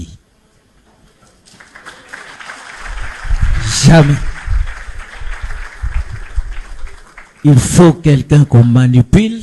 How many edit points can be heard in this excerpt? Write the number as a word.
zero